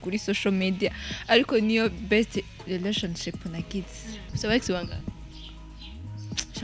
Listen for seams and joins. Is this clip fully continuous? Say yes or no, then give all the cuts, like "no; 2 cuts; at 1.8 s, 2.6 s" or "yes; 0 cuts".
no; 1 cut; at 4.2 s